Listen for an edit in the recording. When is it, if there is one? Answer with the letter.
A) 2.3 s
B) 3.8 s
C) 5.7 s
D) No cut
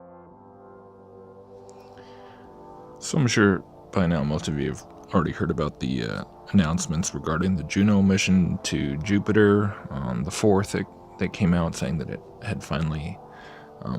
B